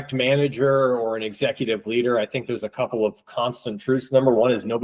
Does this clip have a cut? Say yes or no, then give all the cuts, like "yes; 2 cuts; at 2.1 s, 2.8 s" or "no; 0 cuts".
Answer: no; 0 cuts